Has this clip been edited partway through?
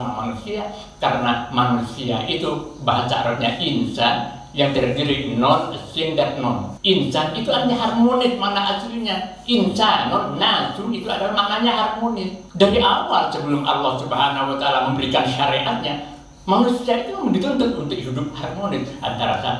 yes; 2 cuts; at 6.7 s, 12.4 s

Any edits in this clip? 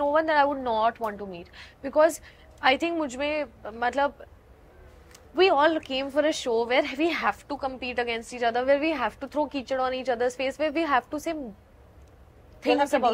no; 0 cuts

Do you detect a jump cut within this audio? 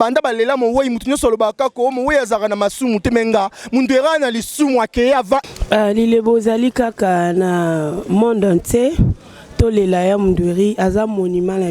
yes; 1 cut; at 5.4 s

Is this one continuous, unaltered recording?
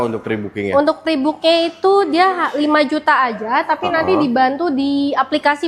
yes; 0 cuts

